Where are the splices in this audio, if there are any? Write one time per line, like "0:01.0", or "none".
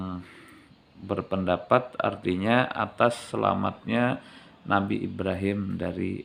none